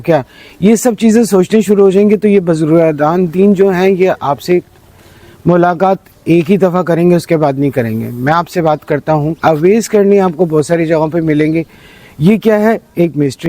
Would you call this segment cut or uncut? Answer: cut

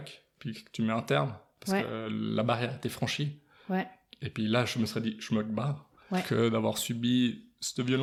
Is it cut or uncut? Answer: uncut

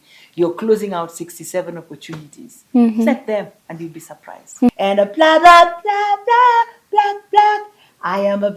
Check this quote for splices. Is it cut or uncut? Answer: cut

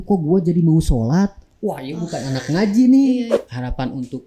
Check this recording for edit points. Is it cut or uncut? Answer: cut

